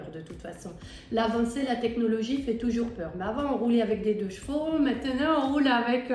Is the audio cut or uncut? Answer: uncut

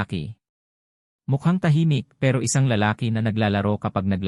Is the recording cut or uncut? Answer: uncut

